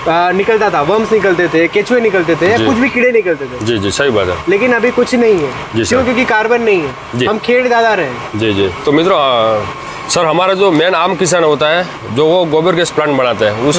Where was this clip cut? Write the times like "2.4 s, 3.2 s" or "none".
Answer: none